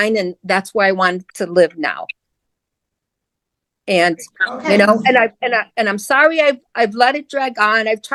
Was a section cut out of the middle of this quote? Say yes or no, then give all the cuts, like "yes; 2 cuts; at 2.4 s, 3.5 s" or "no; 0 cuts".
no; 0 cuts